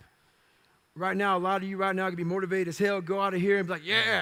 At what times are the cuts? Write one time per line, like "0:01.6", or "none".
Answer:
none